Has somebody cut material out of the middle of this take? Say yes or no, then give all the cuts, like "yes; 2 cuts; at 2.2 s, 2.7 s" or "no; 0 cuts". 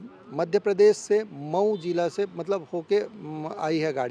no; 0 cuts